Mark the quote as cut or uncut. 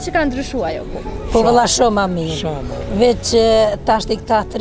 uncut